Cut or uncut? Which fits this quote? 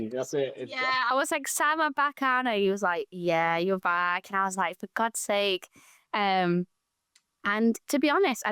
uncut